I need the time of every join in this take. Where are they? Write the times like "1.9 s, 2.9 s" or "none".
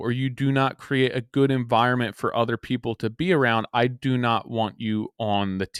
none